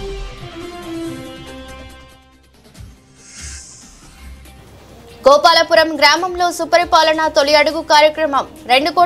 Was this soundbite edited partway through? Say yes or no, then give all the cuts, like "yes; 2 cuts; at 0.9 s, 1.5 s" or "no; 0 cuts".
no; 0 cuts